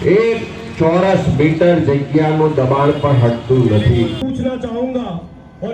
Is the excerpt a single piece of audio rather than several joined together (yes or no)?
no